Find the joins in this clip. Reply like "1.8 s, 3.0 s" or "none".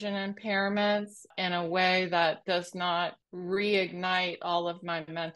1.3 s, 3.3 s